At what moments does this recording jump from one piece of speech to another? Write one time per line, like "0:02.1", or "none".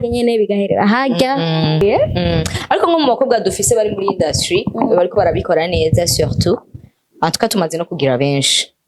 0:01.8